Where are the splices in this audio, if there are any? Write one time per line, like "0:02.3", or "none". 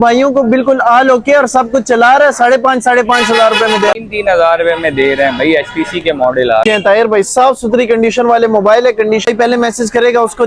0:03.9
0:06.6
0:09.3